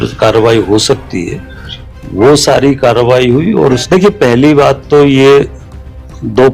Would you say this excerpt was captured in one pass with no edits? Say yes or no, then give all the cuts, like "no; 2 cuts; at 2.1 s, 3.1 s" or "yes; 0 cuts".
no; 1 cut; at 3.8 s